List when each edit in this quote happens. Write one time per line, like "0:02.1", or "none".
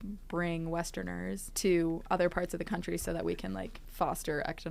0:01.5
0:03.8

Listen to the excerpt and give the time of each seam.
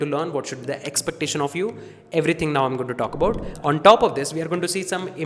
0:03.5

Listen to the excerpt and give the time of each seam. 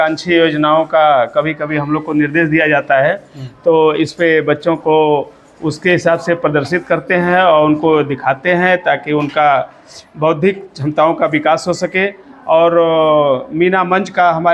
none

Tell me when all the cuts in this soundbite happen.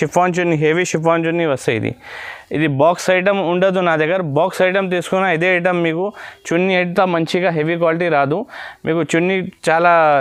none

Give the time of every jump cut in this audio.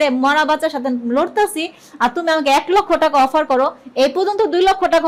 none

